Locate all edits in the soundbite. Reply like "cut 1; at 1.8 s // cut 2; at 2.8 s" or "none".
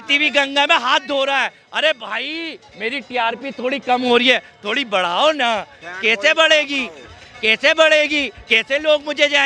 none